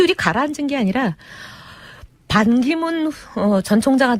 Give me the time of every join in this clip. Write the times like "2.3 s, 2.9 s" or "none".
2.1 s